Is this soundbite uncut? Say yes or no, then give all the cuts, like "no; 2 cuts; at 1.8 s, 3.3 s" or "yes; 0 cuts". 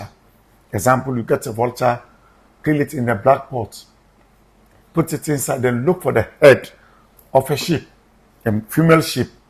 yes; 0 cuts